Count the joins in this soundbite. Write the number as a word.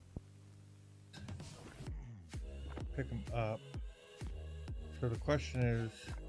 one